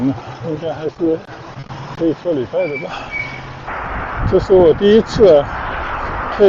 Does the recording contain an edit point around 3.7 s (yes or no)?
yes